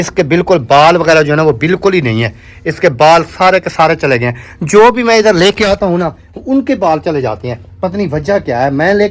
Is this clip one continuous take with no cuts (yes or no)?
yes